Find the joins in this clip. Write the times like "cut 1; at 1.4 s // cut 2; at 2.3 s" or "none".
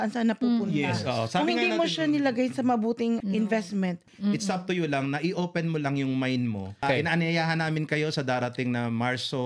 cut 1; at 3.2 s // cut 2; at 4.1 s // cut 3; at 6.8 s